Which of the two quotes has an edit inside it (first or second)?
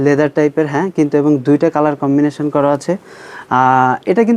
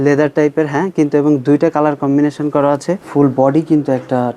second